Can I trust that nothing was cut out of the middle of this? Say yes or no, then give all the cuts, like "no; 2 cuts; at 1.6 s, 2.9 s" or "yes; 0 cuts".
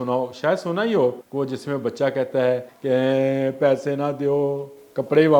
no; 2 cuts; at 1.2 s, 2.7 s